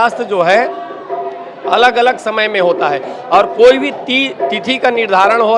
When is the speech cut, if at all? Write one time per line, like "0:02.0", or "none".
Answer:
none